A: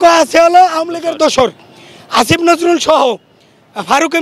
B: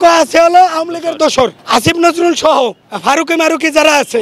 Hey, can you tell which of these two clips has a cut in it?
B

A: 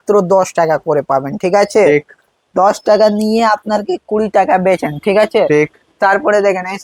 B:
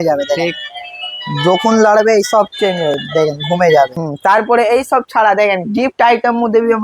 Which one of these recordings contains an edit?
B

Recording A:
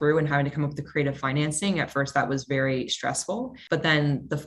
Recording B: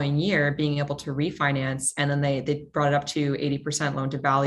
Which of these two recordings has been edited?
A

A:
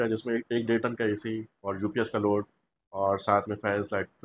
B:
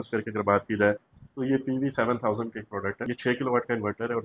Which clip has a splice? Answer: B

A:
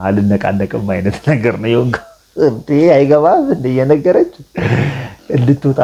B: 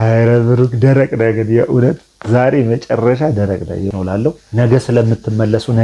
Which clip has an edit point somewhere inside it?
B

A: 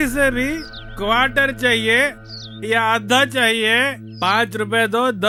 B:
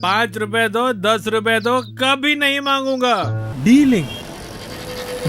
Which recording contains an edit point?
B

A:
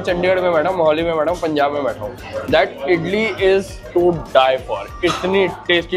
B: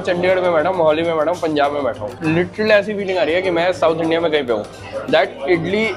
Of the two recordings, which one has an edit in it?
A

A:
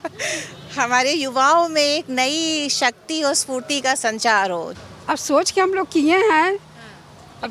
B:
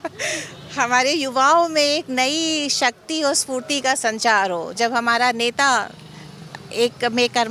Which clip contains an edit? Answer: A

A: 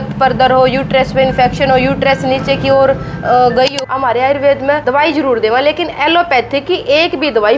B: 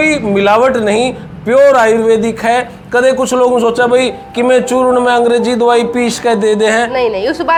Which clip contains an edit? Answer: A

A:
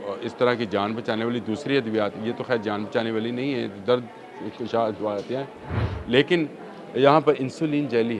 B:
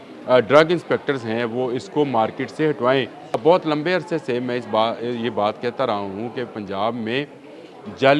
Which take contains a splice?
B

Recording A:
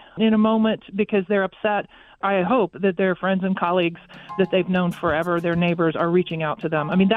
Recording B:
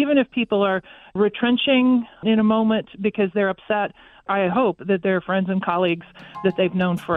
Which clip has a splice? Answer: B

